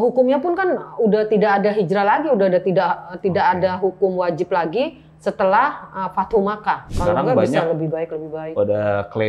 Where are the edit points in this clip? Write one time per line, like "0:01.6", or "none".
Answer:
0:06.9